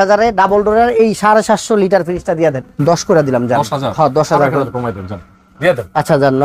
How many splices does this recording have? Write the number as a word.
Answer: one